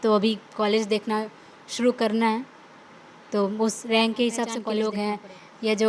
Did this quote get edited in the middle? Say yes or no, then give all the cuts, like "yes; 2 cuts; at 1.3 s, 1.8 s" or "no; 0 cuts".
yes; 1 cut; at 4.6 s